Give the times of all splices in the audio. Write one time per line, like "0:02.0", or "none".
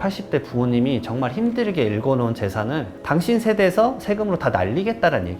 none